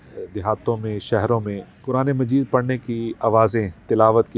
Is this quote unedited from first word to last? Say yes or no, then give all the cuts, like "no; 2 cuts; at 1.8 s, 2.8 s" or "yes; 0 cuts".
no; 1 cut; at 1.7 s